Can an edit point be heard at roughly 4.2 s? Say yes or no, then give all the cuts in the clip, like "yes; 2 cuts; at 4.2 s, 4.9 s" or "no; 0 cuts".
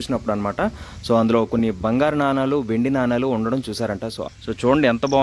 yes; 1 cut; at 4.2 s